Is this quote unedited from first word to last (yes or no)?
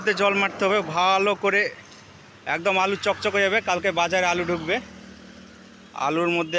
yes